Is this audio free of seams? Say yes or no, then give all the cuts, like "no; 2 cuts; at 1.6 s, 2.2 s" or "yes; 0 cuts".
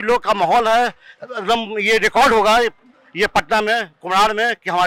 yes; 0 cuts